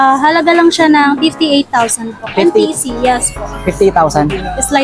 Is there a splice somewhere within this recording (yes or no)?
no